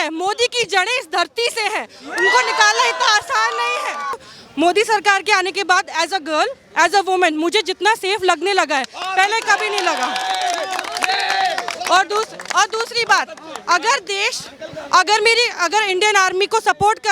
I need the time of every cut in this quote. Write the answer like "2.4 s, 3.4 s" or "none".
4.3 s